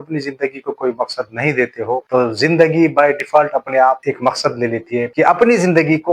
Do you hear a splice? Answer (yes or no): yes